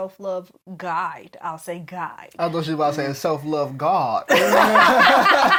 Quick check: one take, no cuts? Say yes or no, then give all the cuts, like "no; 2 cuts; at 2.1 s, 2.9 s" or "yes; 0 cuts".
yes; 0 cuts